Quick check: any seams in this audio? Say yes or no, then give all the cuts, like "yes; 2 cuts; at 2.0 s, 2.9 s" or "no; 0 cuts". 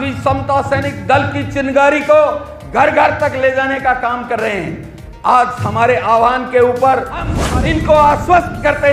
yes; 1 cut; at 7.4 s